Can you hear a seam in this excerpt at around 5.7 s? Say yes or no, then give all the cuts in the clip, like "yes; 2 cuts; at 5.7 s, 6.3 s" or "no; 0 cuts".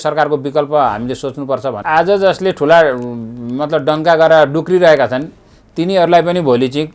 no; 1 cut; at 1.8 s